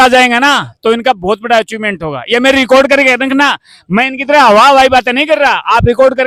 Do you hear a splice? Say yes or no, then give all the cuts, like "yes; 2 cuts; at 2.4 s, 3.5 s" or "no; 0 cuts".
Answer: no; 0 cuts